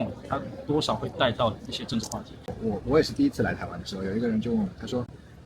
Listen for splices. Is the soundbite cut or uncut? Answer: cut